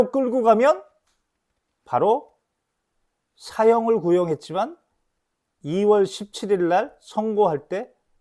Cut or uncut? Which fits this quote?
uncut